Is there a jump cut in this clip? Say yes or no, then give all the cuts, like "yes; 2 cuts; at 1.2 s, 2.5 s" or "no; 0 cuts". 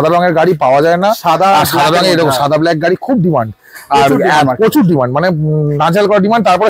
no; 0 cuts